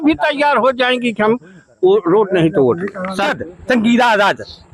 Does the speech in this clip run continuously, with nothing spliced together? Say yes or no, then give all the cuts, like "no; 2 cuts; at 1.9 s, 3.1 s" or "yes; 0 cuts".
no; 1 cut; at 3.3 s